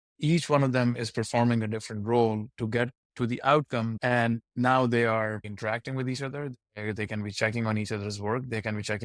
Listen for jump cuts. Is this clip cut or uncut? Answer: cut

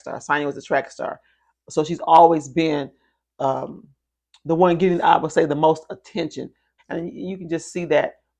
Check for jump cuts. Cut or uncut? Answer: cut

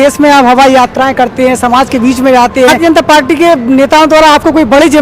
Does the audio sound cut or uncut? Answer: cut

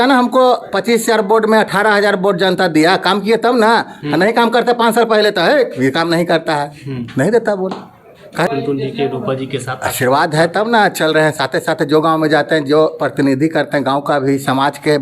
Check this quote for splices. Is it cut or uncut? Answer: cut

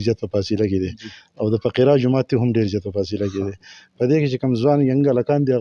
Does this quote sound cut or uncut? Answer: uncut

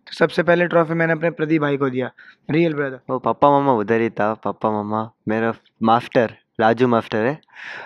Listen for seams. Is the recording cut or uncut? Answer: cut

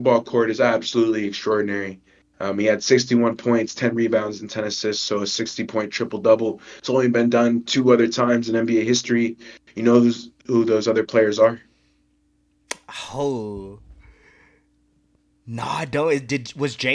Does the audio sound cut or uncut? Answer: uncut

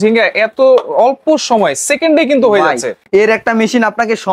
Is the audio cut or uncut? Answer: uncut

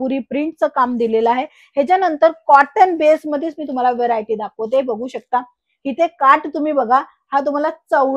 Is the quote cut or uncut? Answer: uncut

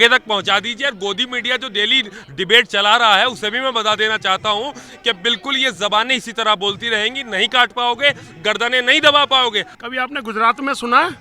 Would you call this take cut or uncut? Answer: cut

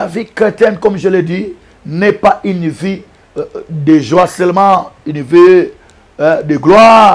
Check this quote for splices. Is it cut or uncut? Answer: uncut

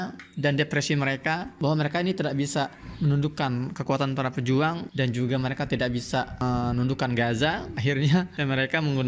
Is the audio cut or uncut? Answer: cut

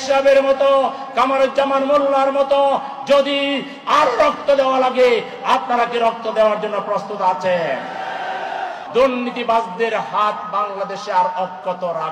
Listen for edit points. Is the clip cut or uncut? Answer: cut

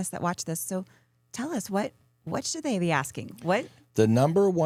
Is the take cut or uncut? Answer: uncut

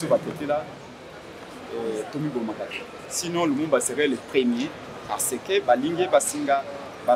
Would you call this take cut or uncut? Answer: uncut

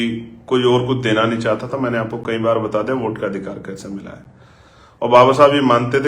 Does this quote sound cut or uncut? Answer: uncut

